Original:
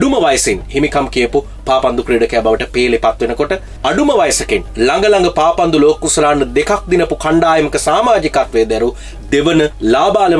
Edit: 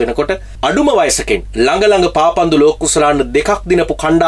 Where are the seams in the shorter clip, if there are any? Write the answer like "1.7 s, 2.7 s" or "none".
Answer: none